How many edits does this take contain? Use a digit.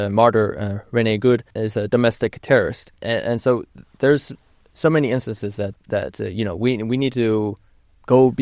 3